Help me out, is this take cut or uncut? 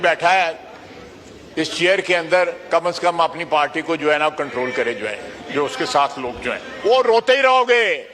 cut